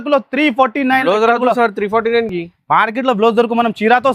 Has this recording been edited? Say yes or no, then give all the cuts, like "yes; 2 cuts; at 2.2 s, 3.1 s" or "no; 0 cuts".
no; 0 cuts